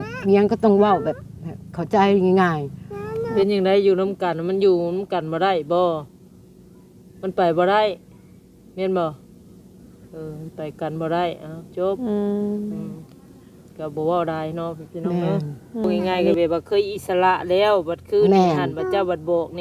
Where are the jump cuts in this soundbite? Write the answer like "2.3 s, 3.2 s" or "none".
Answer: 3.3 s, 16.0 s